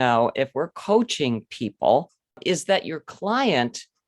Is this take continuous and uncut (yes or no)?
no